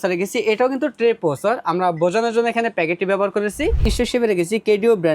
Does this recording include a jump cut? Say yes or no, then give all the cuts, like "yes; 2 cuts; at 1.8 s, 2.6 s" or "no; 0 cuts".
yes; 1 cut; at 3.9 s